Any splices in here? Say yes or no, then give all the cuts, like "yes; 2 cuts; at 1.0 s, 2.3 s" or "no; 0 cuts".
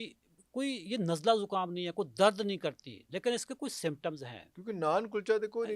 no; 0 cuts